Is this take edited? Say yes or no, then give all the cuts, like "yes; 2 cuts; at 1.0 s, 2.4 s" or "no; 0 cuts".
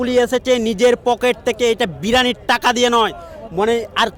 no; 0 cuts